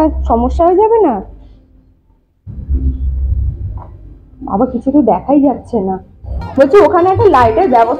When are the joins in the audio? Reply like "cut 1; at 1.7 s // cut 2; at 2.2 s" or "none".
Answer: none